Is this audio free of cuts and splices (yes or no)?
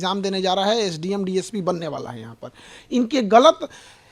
yes